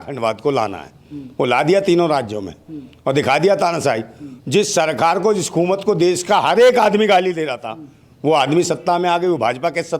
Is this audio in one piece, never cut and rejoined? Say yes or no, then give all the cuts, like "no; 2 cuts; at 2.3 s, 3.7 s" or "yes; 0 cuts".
yes; 0 cuts